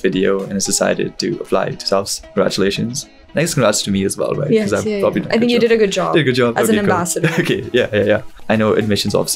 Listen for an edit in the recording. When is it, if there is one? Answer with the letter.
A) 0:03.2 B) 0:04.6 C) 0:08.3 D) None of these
C